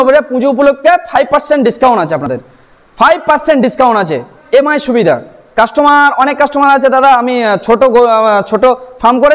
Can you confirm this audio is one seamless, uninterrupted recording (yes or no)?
yes